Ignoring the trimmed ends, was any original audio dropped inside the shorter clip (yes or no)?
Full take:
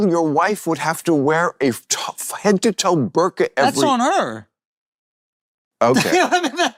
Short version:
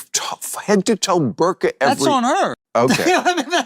yes